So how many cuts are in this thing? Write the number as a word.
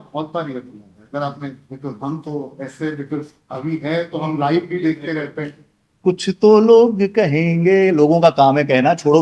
one